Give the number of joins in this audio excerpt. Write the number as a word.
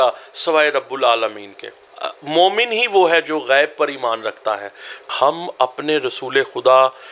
two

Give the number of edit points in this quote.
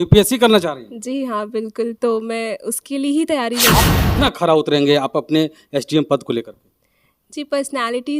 one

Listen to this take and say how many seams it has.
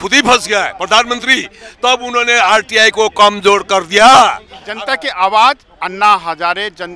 one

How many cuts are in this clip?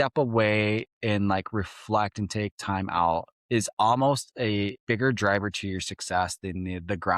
two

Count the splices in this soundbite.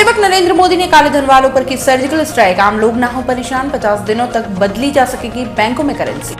zero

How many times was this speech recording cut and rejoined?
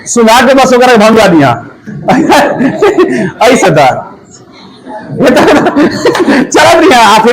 one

